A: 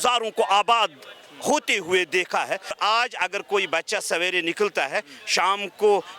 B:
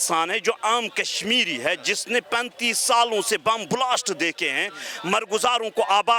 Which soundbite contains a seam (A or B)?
A